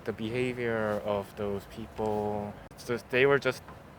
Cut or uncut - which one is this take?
cut